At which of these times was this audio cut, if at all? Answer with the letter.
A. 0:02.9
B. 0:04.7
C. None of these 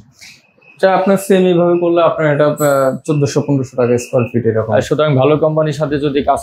B